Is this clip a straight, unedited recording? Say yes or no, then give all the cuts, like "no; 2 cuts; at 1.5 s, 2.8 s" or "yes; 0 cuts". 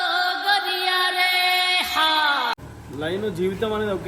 no; 1 cut; at 2.7 s